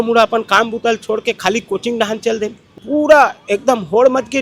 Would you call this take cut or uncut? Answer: cut